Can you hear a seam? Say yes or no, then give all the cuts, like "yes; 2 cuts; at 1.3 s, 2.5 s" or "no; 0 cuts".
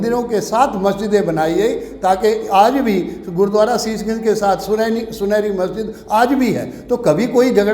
no; 0 cuts